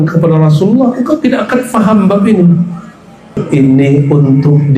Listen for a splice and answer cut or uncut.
cut